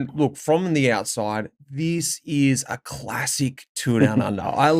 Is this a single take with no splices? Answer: yes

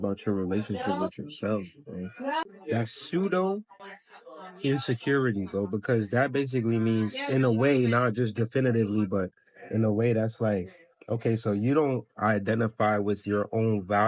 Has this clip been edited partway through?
yes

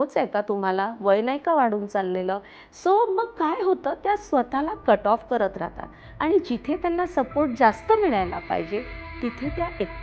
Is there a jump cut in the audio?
no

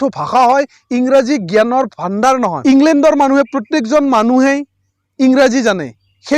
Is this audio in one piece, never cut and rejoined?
no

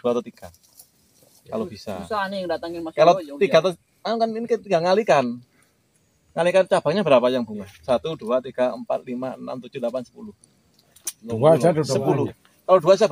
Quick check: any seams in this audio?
no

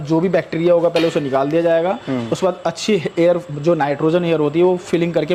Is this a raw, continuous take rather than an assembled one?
yes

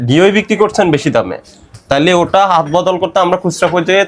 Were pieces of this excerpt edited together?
no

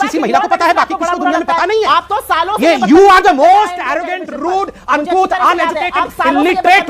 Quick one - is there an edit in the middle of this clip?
no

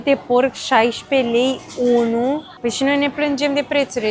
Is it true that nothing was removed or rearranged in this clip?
no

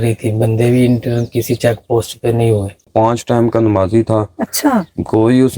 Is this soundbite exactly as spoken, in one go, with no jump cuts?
no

